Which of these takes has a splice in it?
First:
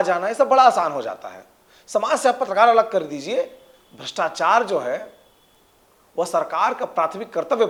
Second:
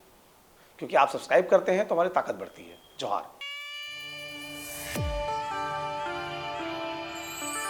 second; 1 cut; at 3.5 s

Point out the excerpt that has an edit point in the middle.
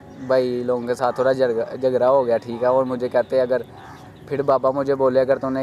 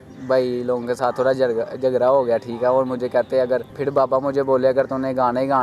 second; 1 cut; at 3.7 s

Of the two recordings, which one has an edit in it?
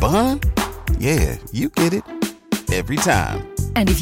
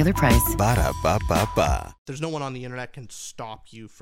second; 1 cut; at 2.1 s

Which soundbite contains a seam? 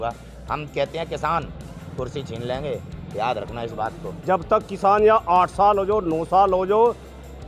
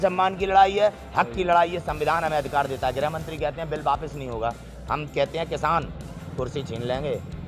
first; 1 cut; at 4.1 s

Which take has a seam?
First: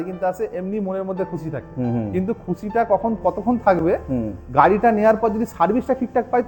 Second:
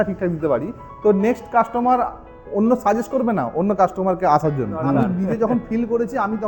second; 1 cut; at 5.0 s

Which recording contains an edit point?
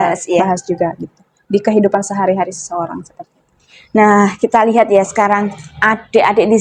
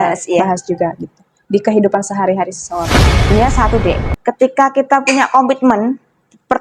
second; 1 cut; at 3.1 s

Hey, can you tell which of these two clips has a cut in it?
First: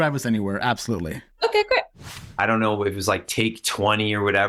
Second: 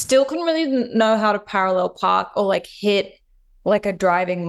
first; 1 cut; at 2.1 s

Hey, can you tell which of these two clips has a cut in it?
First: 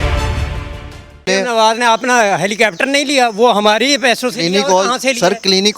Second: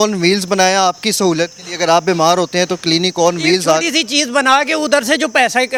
first; 1 cut; at 1.3 s

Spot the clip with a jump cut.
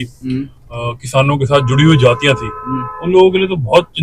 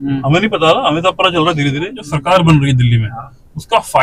second; 1 cut; at 2.1 s

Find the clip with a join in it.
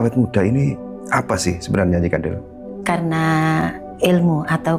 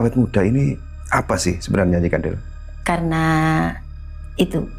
first; 1 cut; at 3.6 s

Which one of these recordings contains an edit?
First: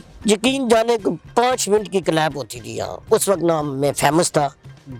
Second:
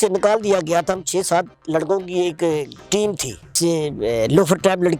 second; 1 cut; at 3.6 s

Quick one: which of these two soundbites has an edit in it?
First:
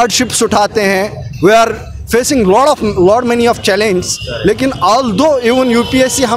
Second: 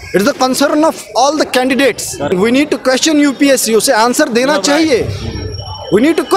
second; 1 cut; at 2.3 s

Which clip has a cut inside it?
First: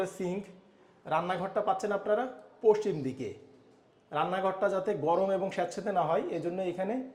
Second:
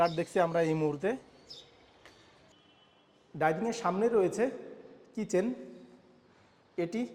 second; 1 cut; at 2.5 s

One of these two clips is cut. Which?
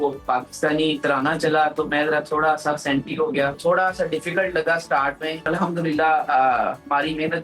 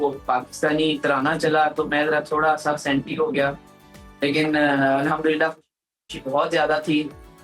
first; 2 cuts; at 3.6 s, 5.5 s

